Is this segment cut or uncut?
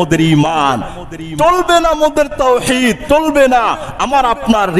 cut